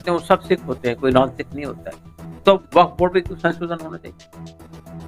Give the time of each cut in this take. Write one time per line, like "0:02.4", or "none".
0:04.2

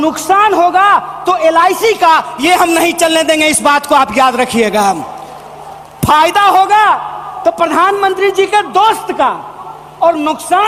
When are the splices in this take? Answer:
none

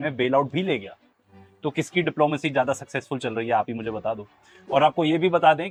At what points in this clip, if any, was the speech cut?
none

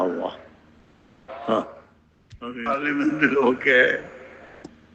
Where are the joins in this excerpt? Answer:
0:02.6

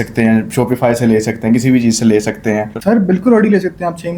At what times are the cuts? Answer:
0:02.8

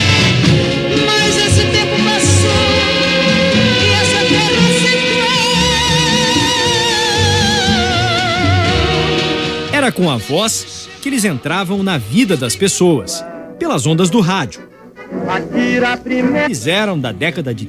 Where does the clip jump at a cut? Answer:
none

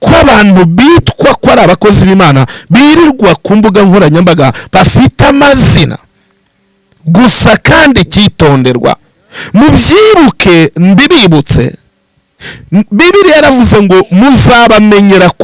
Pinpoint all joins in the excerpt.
none

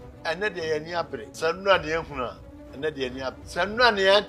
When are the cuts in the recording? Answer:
0:01.3
0:03.4

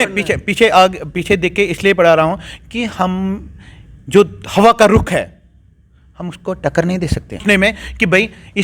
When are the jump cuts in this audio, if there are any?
0:07.4

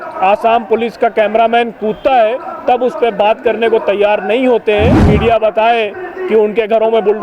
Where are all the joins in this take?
0:05.1

